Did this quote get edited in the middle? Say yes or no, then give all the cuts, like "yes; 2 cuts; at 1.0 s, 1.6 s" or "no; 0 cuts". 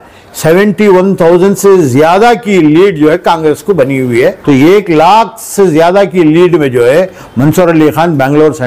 yes; 1 cut; at 4.4 s